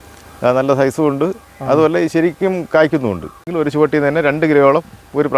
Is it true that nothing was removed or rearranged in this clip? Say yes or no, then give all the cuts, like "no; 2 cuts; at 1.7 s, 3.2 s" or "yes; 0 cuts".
no; 1 cut; at 3.4 s